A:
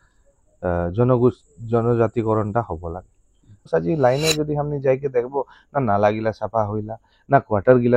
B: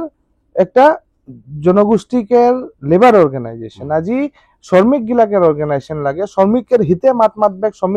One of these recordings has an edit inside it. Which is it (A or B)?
A